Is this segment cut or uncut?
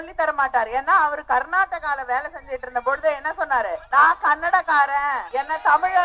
cut